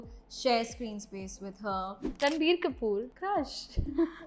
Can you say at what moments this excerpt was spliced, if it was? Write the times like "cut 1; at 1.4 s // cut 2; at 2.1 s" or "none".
cut 1; at 2.0 s // cut 2; at 3.1 s